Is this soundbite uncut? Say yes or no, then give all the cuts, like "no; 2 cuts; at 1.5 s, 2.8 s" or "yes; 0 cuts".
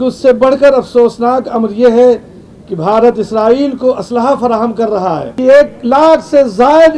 no; 1 cut; at 5.3 s